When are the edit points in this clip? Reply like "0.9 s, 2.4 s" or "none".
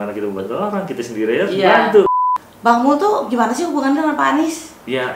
2.1 s